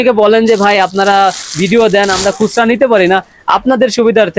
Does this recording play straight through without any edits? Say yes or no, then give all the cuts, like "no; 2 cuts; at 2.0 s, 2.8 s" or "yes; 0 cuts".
yes; 0 cuts